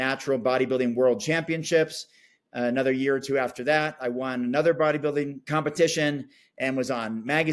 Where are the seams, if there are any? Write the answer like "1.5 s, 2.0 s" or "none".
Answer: 5.4 s